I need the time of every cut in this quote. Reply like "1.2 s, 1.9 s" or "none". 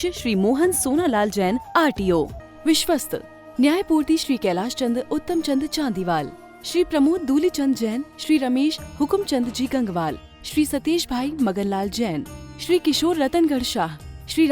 2.4 s